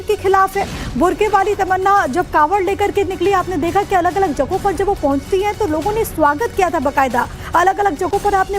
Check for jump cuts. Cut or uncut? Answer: cut